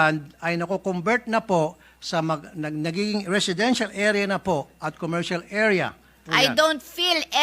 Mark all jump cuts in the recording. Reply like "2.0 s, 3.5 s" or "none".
6.2 s